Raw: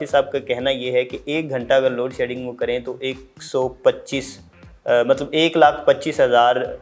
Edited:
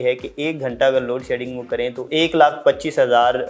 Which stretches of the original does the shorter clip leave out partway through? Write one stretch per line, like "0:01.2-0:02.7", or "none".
0:02.9-0:05.3